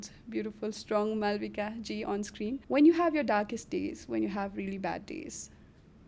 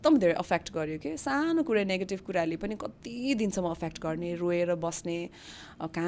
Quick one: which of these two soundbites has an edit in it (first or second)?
first